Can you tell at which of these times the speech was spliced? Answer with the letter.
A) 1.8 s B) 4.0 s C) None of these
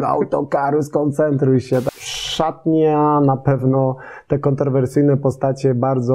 A